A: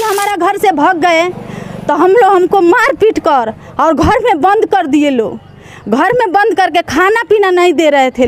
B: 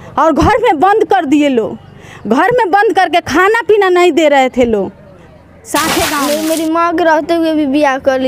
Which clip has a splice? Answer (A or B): B